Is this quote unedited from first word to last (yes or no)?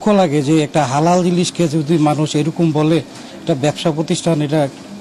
yes